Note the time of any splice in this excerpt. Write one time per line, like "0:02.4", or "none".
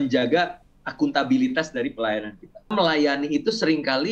0:02.7